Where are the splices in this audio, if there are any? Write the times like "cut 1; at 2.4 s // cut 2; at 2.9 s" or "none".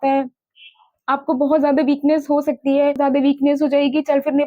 cut 1; at 3.0 s